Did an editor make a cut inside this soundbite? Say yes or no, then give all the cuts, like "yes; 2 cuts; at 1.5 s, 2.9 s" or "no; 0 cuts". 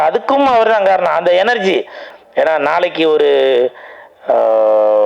yes; 1 cut; at 2.1 s